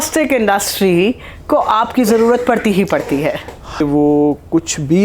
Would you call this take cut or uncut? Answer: cut